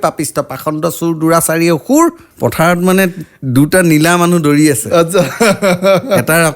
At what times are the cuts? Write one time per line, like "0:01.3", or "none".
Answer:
0:02.3